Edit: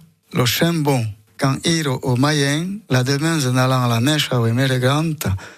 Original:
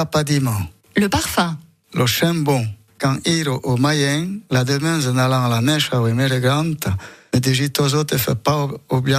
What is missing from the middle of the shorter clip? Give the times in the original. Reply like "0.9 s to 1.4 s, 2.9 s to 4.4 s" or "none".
none